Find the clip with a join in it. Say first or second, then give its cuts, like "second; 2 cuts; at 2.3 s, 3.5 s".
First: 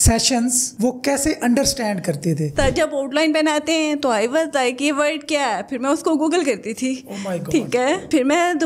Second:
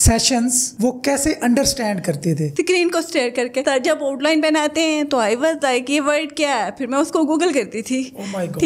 first; 1 cut; at 2.5 s